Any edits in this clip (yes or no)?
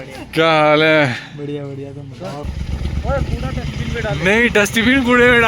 yes